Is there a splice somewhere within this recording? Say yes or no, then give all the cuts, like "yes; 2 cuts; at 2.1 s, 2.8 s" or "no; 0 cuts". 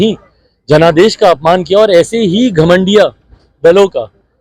no; 0 cuts